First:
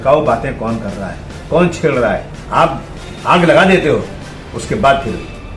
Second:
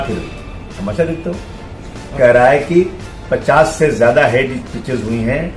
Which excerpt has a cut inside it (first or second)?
second